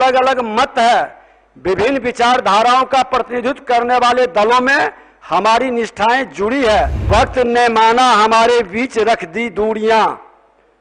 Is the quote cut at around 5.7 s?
no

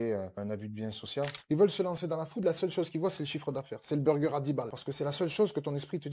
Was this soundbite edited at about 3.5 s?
no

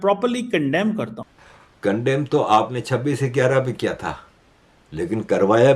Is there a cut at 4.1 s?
no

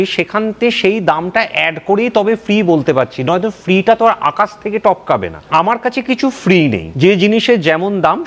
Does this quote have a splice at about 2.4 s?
no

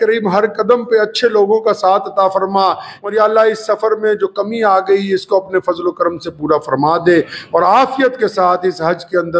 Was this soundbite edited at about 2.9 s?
yes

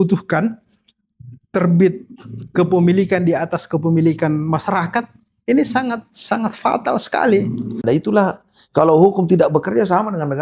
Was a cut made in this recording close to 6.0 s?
no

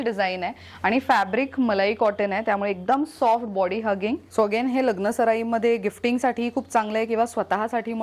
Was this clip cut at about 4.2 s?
yes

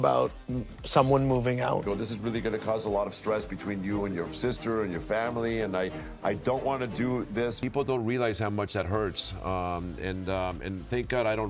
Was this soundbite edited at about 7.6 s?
yes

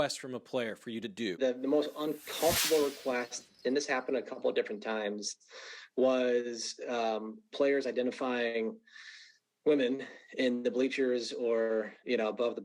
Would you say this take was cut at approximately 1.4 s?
yes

